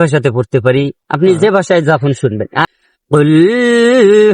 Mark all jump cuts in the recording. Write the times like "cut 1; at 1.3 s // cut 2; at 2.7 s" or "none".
cut 1; at 2.7 s